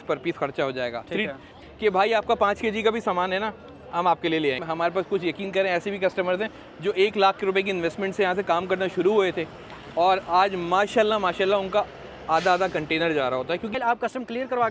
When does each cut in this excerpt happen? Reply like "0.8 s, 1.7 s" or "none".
1.5 s, 4.6 s, 13.7 s